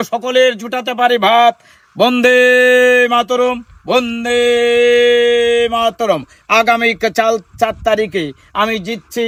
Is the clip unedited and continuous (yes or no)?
yes